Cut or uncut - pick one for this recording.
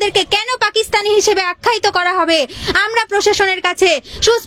uncut